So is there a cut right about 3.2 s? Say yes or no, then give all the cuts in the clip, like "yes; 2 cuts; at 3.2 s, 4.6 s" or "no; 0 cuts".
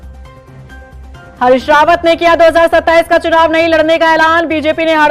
no; 1 cut; at 0.9 s